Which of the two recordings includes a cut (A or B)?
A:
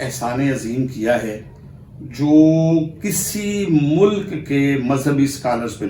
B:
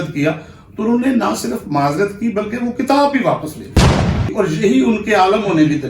B